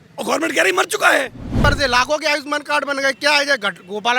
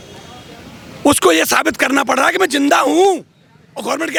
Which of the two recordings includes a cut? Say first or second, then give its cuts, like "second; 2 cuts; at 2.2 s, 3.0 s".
first; 1 cut; at 1.6 s